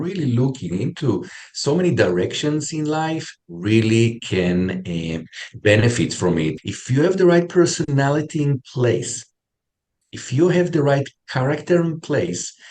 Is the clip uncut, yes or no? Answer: no